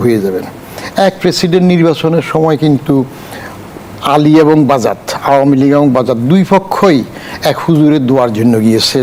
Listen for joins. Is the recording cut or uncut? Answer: uncut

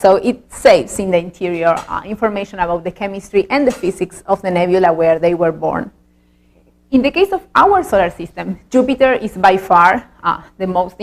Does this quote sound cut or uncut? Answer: cut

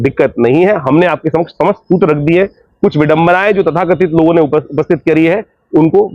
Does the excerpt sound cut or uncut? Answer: uncut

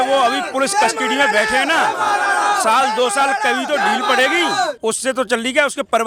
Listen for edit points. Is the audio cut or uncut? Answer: uncut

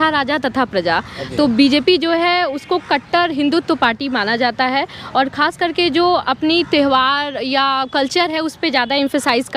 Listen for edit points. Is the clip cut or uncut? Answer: uncut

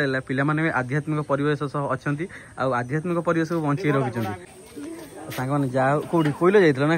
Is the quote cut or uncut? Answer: cut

